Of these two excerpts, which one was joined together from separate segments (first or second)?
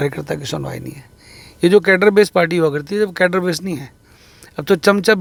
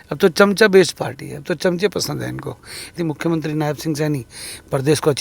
second